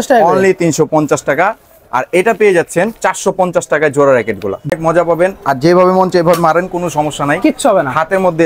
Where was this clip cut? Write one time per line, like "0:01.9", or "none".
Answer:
0:04.7

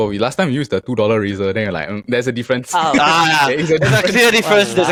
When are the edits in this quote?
none

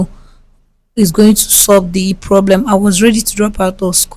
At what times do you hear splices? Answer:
none

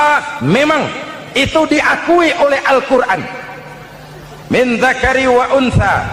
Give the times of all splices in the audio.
none

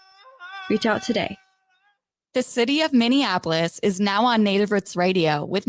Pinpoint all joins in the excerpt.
0:02.1

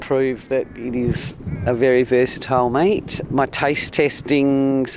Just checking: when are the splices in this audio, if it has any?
none

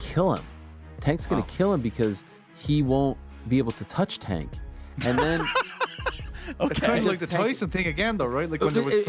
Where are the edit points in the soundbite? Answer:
none

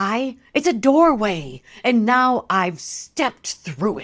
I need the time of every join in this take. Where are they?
none

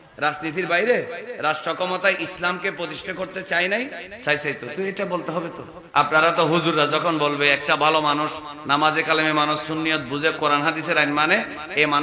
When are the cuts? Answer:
0:01.3
0:04.0
0:05.7

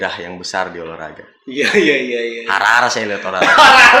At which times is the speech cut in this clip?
none

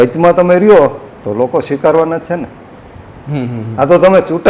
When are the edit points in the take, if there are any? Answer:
none

